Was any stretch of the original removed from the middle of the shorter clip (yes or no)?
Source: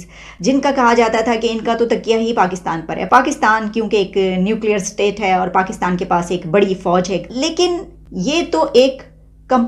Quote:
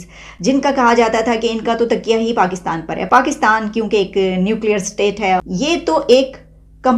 yes